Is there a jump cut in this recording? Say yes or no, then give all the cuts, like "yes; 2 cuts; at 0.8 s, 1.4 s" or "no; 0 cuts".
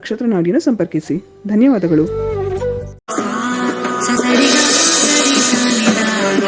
yes; 1 cut; at 3.0 s